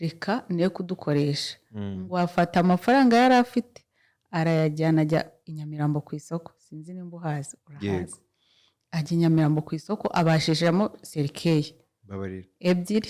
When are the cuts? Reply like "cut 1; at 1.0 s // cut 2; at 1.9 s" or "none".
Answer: none